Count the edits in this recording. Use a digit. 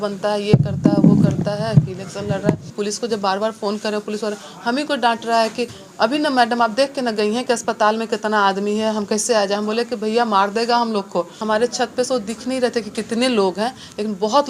2